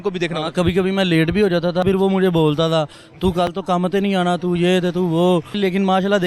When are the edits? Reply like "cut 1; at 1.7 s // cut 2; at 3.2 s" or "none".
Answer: cut 1; at 1.8 s // cut 2; at 5.6 s